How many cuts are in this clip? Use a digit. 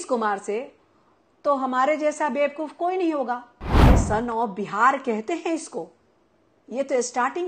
1